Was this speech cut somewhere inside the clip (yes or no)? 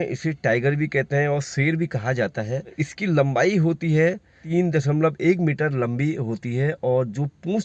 yes